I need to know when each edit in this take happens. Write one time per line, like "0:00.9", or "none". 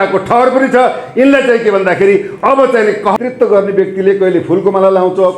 0:03.2